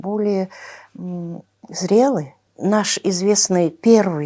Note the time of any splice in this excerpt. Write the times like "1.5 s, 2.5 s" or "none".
2.5 s